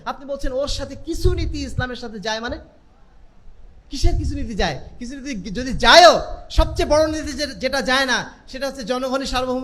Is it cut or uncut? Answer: uncut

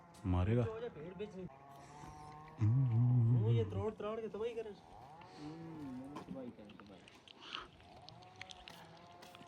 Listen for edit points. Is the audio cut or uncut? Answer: cut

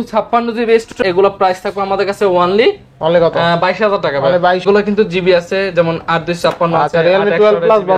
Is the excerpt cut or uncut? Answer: cut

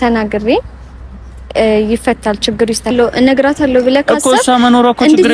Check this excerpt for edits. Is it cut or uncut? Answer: cut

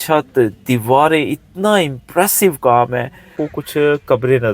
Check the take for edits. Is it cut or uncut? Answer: cut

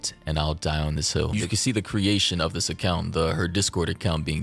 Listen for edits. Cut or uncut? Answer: cut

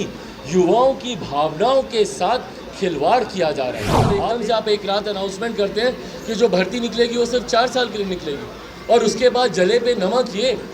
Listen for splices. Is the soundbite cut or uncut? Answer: cut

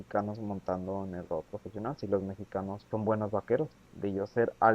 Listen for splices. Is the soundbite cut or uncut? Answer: cut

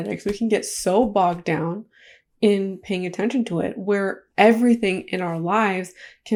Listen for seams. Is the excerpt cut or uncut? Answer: uncut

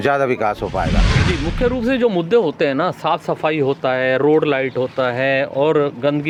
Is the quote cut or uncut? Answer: uncut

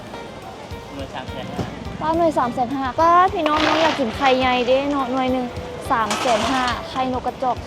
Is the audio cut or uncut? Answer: cut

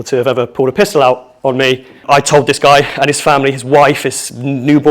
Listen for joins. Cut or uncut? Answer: cut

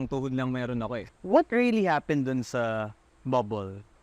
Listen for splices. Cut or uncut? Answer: cut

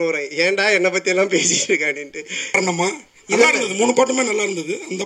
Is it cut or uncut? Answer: cut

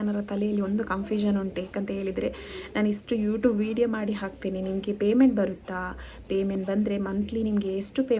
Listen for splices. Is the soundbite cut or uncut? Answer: uncut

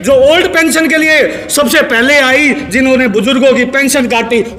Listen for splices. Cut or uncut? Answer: uncut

